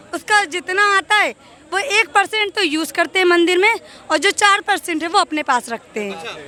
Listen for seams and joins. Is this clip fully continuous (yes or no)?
yes